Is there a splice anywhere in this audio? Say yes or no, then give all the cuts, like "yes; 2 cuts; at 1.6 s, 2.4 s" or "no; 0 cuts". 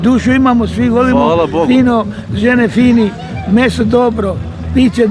no; 0 cuts